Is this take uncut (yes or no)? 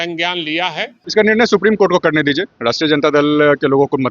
no